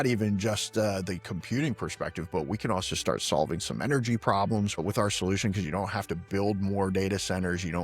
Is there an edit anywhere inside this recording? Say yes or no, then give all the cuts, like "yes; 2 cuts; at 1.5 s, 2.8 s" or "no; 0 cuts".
yes; 1 cut; at 4.7 s